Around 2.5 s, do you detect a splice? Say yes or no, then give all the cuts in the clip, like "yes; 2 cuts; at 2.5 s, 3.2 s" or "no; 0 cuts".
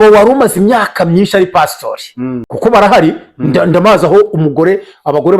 yes; 1 cut; at 2.5 s